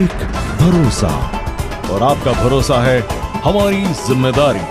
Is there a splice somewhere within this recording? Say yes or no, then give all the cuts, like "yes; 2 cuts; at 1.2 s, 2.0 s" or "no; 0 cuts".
no; 0 cuts